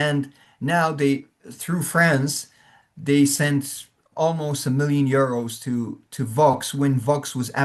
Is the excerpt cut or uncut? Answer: uncut